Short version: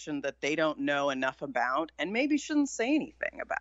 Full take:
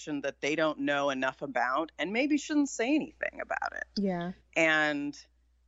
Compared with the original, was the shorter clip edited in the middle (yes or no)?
no